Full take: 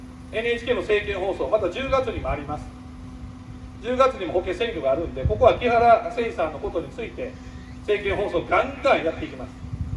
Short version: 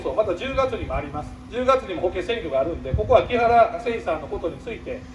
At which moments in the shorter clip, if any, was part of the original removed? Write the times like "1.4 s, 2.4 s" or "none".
1.3 s